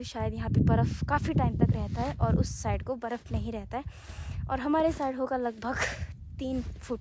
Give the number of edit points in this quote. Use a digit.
0